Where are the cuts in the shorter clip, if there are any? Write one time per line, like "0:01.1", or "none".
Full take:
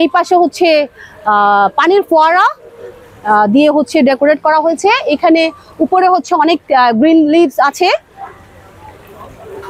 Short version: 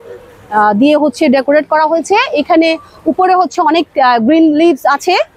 none